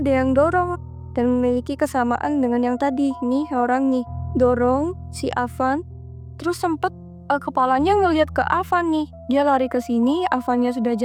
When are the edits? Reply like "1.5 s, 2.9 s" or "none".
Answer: none